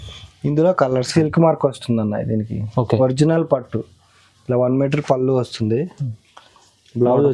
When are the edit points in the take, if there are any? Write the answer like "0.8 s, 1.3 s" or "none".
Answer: 1.1 s